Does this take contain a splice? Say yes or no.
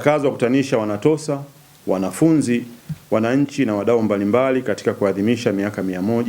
no